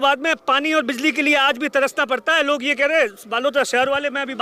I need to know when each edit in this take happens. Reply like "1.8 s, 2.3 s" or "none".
none